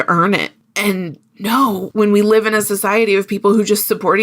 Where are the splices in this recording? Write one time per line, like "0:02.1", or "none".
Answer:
0:01.8

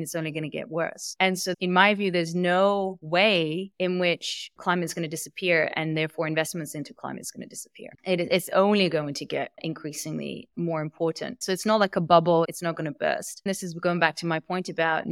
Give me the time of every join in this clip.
0:01.5
0:13.4

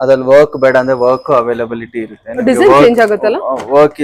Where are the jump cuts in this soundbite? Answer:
none

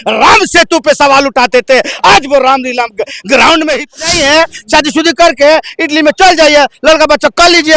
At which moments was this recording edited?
0:03.9

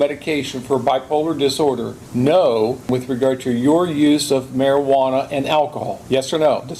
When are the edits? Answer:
0:02.0
0:02.9
0:05.9

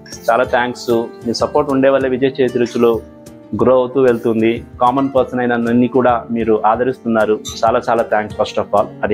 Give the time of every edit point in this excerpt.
none

